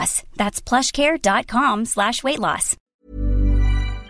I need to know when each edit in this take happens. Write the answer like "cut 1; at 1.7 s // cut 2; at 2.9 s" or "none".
cut 1; at 2.9 s